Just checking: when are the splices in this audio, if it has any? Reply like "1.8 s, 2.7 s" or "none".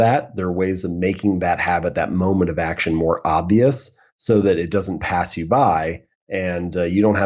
none